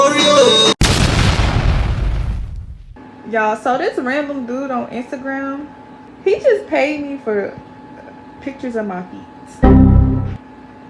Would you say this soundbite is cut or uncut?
uncut